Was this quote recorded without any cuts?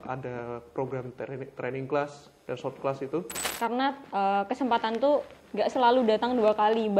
no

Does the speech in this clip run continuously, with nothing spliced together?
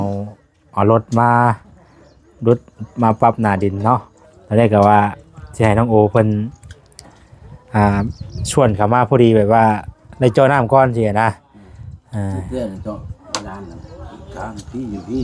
yes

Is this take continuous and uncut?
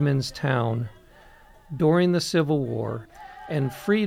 no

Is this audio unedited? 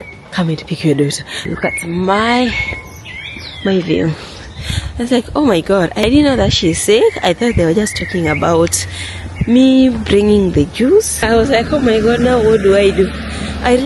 no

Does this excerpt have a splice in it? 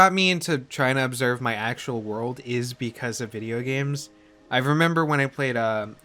no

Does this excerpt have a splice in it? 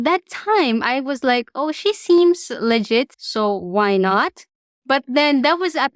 yes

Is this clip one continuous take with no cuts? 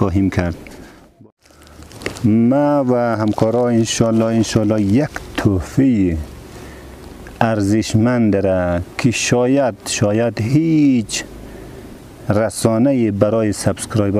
no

